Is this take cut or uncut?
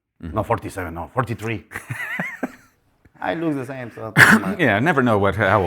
uncut